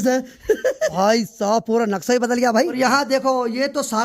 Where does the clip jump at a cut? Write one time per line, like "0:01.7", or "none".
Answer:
0:00.9
0:02.7